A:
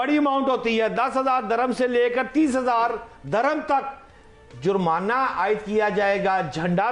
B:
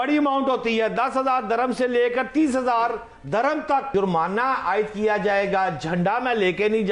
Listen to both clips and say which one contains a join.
B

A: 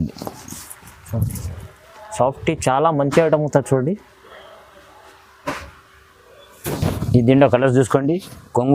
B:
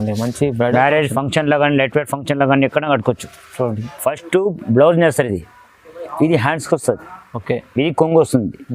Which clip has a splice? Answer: B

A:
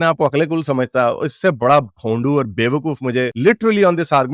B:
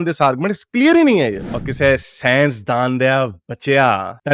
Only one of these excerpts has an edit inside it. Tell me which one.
B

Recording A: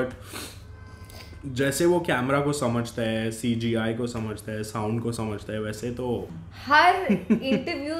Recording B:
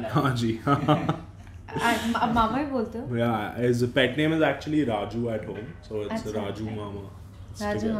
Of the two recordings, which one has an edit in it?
A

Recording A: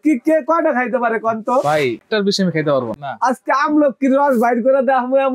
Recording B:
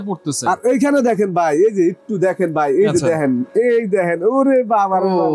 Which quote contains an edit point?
A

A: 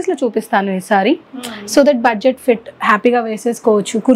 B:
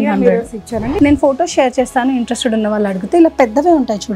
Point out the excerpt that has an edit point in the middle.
B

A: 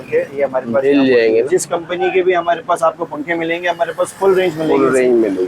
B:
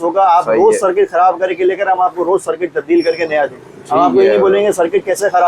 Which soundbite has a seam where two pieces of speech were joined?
A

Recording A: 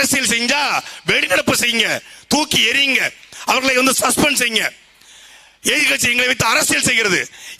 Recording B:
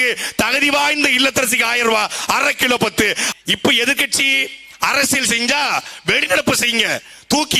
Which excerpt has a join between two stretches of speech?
B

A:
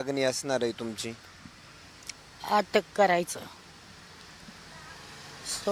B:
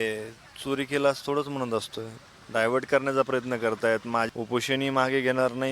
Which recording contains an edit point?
B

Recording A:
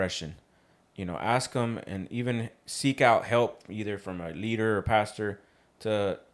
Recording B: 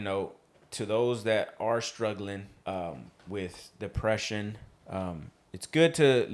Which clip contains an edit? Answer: B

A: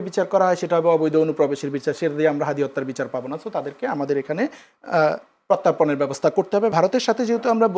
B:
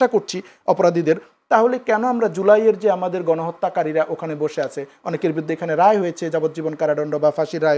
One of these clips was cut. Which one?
A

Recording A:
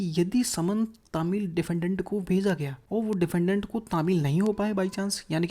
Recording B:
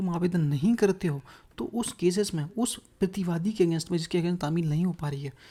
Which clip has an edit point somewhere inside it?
A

